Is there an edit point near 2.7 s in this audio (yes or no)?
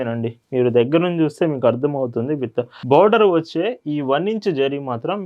yes